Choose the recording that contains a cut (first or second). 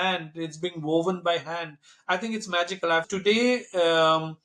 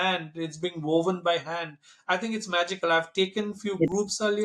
first